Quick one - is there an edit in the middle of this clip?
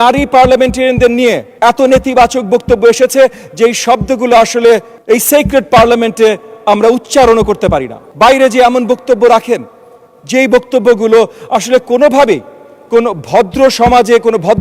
yes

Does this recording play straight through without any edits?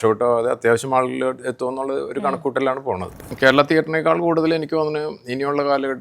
no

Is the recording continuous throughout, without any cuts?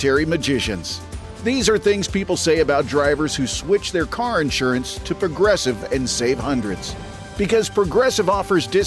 yes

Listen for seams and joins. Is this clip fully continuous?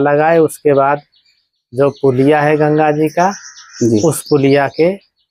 yes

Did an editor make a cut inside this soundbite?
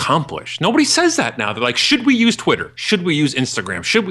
yes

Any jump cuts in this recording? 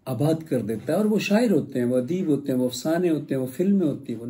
no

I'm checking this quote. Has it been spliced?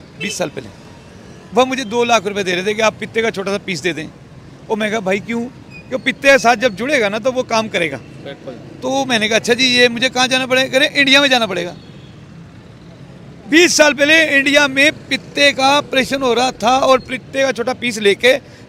no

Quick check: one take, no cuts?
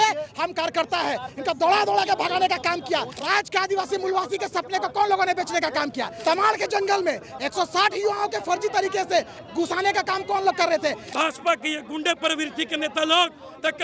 no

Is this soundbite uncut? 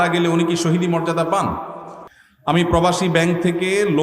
no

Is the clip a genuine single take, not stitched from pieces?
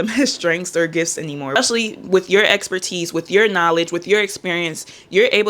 no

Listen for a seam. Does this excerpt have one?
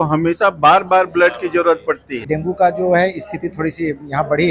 yes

